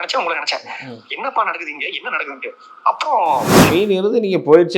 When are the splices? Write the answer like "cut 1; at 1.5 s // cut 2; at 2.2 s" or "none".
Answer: cut 1; at 3.6 s